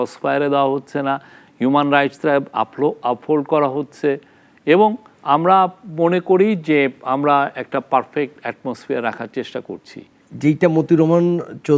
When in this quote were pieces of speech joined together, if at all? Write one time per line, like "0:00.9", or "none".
none